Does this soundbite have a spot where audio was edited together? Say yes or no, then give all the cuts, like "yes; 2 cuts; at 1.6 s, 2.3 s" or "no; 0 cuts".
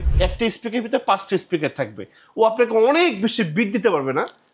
no; 0 cuts